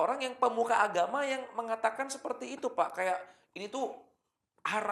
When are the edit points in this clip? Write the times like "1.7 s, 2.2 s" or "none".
none